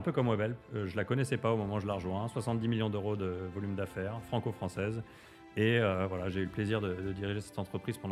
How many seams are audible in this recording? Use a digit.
0